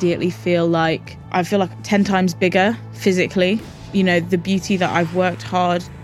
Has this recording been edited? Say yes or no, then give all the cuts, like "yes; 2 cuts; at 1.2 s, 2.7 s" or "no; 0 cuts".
yes; 2 cuts; at 1.1 s, 3.7 s